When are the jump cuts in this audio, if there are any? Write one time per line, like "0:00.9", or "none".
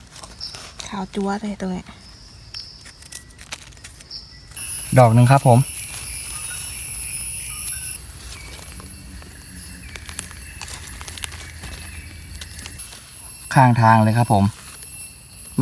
0:04.6
0:08.0
0:12.8